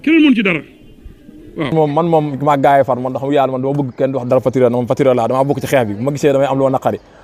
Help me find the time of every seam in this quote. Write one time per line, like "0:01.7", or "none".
0:01.7